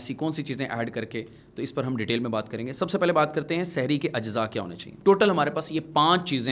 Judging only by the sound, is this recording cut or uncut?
cut